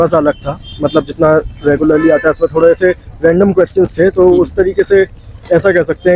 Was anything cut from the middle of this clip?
no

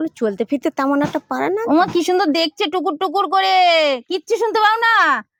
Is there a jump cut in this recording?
no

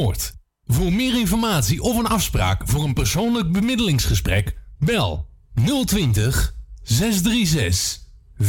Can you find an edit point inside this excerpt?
no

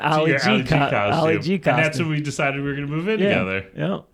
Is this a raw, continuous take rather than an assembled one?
yes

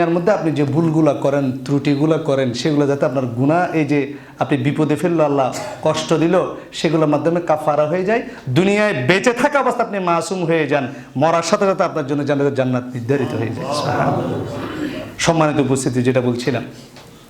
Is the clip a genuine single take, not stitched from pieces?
yes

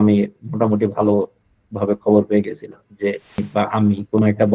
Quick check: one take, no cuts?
no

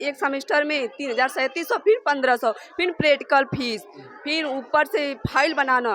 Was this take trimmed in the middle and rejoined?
no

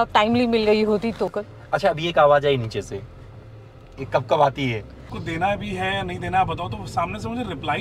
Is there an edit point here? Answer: yes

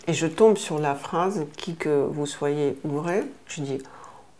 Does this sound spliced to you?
no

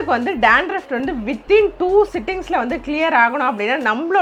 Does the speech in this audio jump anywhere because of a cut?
no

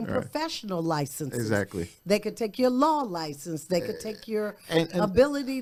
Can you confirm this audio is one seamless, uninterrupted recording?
yes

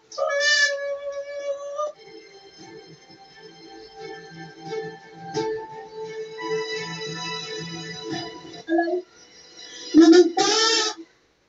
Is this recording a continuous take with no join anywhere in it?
yes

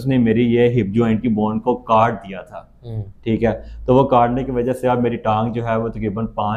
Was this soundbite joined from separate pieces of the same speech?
no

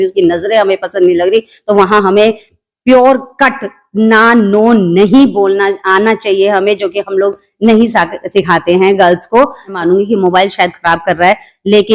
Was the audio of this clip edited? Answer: yes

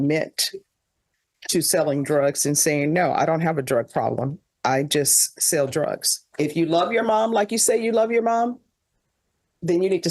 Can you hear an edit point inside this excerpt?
yes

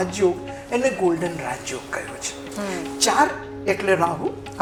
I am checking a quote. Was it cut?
no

